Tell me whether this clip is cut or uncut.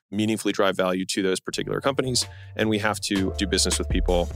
uncut